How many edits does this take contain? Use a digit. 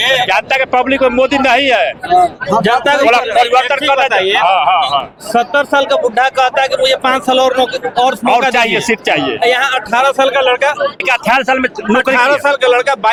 0